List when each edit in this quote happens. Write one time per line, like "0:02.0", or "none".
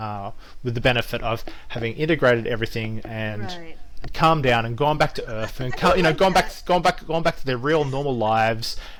none